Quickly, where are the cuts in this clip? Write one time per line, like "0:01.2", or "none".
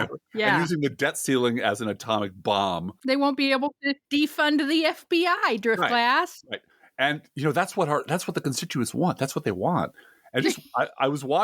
0:02.9
0:03.9